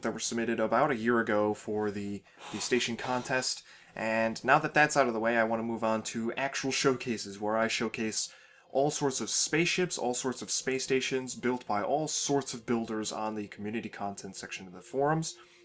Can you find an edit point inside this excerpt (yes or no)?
yes